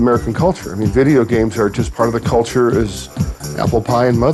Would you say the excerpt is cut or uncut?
cut